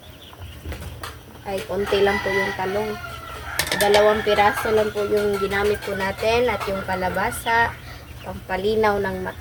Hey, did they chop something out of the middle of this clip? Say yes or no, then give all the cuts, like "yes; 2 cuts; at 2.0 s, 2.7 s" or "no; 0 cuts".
no; 0 cuts